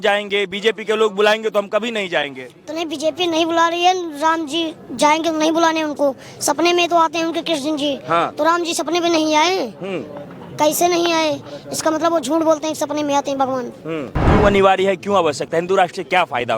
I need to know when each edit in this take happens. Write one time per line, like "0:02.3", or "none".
0:14.2